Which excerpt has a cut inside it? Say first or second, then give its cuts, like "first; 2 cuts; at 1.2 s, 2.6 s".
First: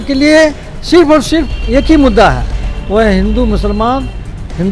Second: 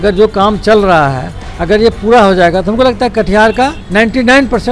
second; 1 cut; at 3.8 s